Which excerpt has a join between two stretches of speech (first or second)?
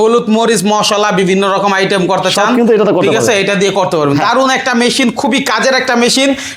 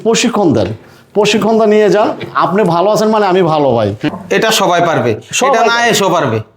second